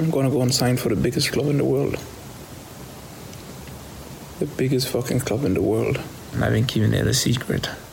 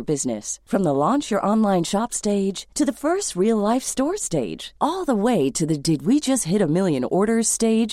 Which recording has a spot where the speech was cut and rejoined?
first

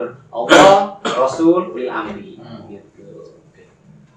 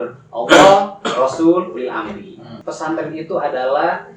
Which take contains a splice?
second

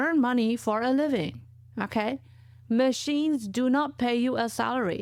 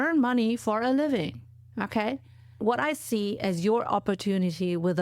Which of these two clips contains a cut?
second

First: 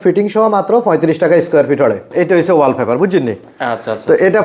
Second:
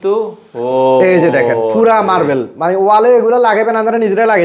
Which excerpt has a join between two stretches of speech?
first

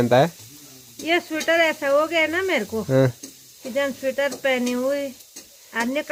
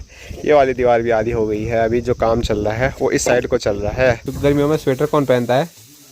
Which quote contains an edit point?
second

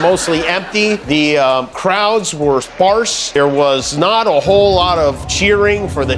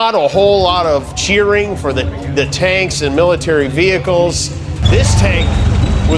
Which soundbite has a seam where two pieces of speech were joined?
first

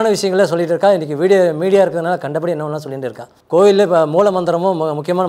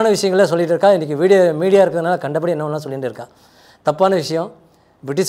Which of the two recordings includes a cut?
first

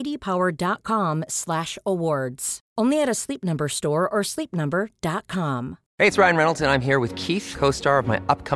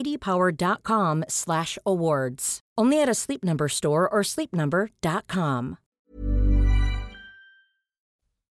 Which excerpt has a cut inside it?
first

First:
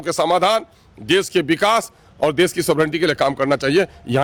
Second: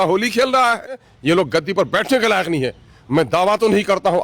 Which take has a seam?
second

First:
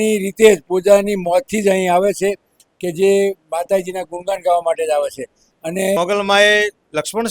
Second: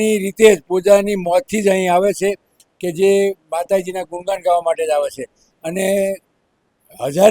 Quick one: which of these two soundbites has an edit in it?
first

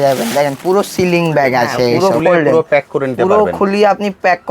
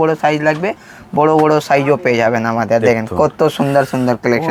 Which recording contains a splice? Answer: first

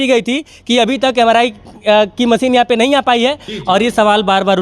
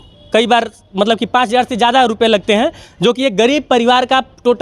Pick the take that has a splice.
first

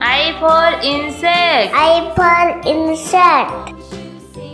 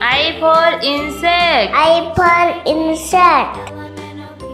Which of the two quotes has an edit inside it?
second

